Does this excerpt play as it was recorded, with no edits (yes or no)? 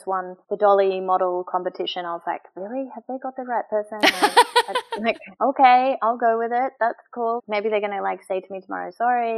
yes